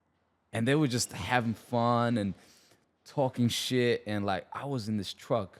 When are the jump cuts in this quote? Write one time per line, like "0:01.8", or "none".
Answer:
none